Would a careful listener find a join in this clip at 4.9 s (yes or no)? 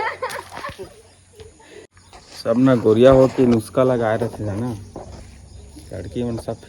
no